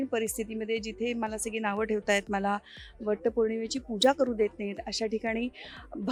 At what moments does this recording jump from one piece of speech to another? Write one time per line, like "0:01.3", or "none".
none